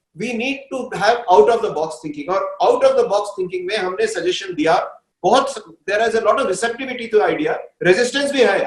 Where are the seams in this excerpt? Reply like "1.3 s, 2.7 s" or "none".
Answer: none